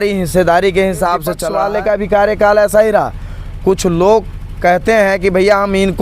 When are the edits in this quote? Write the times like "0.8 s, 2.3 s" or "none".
1.5 s